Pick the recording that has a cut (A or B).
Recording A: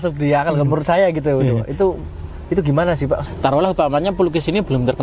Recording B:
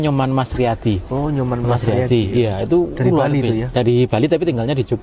A